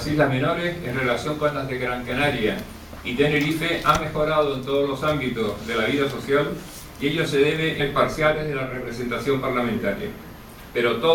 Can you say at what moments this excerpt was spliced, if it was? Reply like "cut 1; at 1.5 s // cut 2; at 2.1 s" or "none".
none